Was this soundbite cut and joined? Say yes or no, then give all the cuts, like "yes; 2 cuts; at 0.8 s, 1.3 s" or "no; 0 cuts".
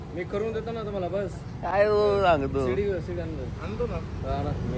no; 0 cuts